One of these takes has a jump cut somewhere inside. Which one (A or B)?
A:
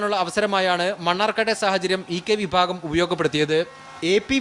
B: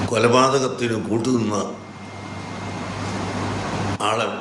A